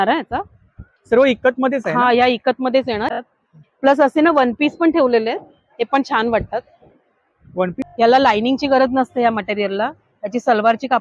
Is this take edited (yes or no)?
yes